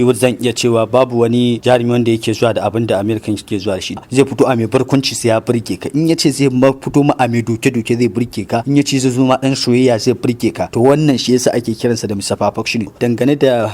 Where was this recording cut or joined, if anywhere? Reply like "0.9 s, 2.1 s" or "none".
4.0 s, 8.6 s, 10.6 s, 13.0 s